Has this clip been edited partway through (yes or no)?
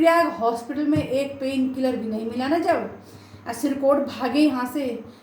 no